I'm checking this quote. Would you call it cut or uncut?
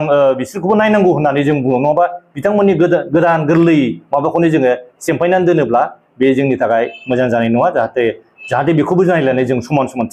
uncut